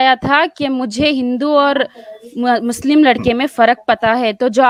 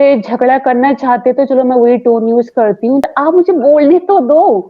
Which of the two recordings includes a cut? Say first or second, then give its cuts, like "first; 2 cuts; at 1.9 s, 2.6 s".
second; 1 cut; at 3.1 s